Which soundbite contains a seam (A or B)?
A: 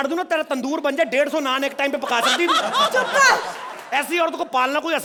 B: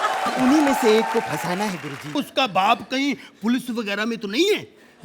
B